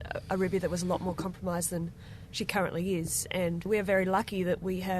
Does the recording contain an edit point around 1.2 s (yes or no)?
no